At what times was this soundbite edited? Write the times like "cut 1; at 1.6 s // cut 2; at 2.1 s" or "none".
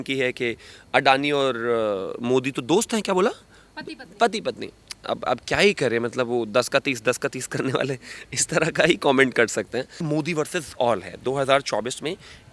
cut 1; at 10.0 s